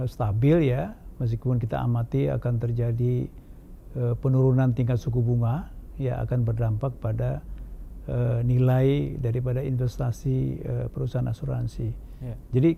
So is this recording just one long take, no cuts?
yes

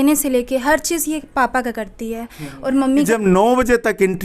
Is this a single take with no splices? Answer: no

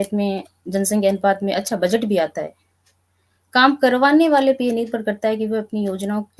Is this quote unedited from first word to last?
yes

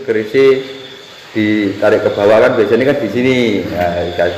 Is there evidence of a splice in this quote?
no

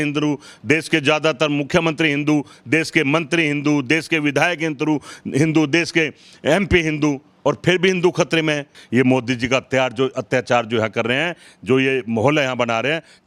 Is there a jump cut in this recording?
no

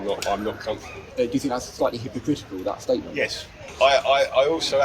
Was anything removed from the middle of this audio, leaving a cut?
yes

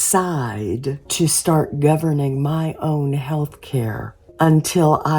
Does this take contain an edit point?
yes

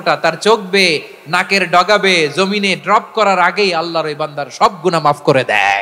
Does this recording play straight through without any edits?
yes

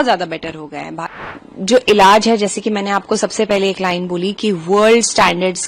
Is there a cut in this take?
yes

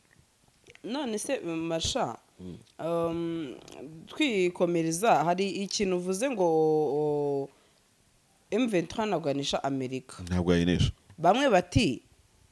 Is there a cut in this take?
yes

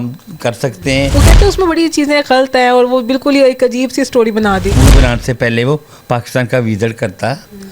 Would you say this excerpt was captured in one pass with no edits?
no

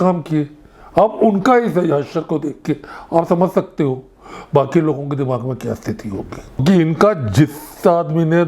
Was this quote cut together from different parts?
yes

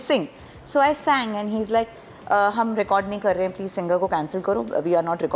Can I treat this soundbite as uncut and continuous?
yes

